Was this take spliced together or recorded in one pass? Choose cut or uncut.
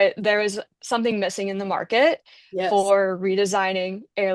uncut